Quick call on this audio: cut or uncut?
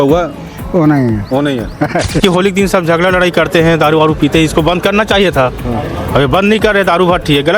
cut